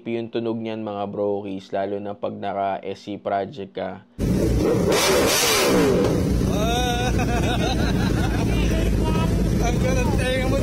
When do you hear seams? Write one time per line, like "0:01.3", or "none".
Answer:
0:04.2